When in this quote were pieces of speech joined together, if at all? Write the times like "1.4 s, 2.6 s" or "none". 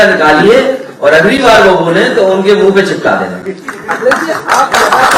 none